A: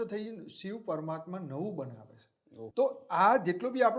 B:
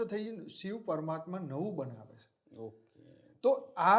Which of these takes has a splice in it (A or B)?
A